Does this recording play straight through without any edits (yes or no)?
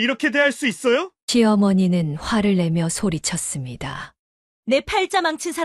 yes